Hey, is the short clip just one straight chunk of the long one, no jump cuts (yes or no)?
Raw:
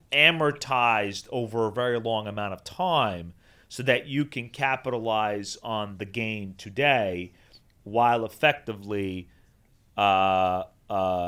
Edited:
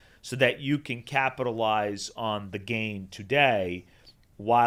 yes